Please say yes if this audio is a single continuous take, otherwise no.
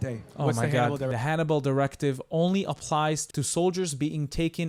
no